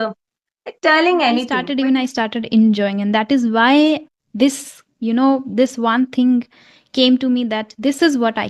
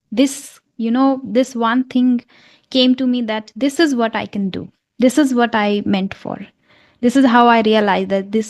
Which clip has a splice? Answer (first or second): first